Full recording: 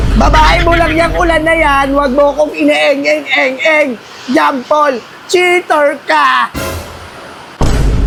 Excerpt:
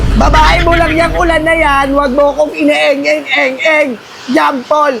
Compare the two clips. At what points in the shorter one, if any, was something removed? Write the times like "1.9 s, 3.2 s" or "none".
none

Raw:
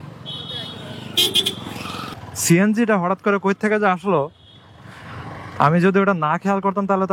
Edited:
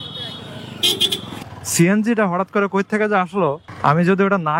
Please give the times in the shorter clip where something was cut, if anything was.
1.5 s, 3.7 s

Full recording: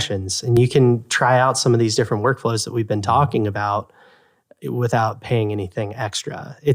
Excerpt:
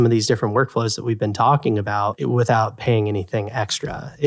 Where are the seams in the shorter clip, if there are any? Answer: 2.2 s

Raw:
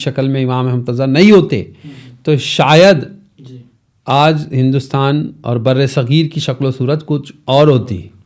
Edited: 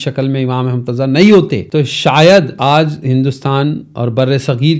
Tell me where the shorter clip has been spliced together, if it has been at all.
1.6 s, 2.5 s

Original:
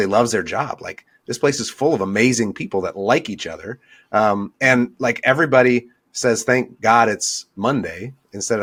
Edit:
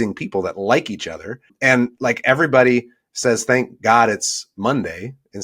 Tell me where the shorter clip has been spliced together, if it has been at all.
1.5 s

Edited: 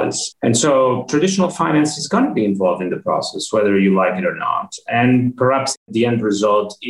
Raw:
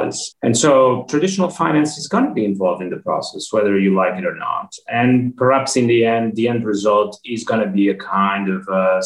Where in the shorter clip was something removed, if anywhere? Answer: 5.8 s

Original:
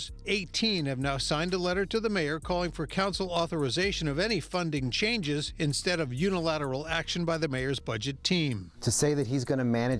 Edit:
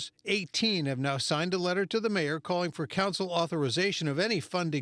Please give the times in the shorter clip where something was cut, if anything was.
none

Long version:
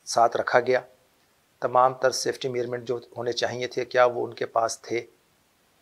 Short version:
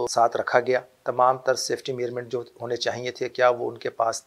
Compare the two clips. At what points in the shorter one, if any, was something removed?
1.0 s

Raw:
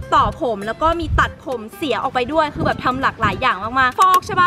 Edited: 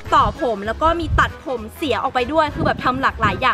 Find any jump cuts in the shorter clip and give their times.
none

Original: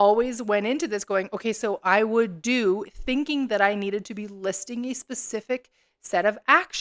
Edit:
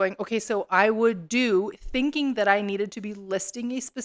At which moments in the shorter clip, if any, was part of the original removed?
none

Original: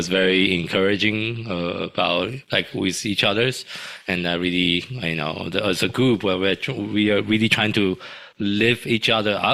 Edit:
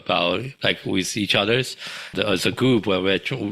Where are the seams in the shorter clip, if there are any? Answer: 2.1 s

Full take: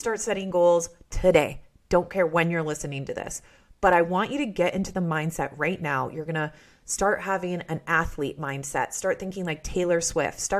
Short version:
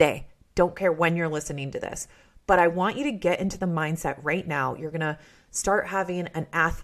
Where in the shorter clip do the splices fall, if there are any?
none

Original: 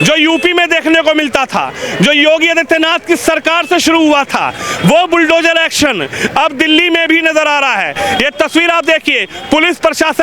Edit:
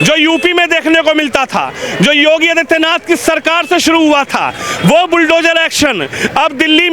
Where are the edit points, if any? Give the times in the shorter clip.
none

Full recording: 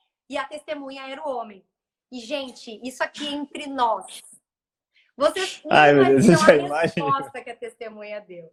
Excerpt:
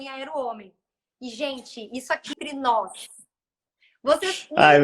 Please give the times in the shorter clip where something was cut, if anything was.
2.4 s

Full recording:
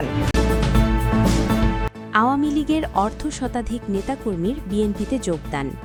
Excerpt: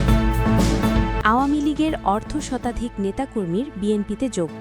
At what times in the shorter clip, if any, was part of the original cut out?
1.1 s

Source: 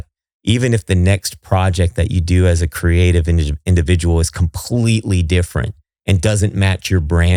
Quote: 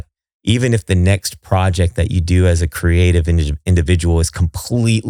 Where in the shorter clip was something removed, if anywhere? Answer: none

